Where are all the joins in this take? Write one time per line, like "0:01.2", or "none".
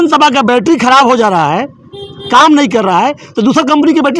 none